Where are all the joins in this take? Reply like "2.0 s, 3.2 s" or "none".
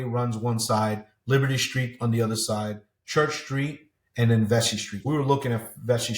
4.9 s